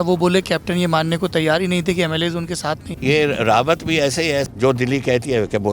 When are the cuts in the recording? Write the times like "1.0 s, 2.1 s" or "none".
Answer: 2.9 s, 4.5 s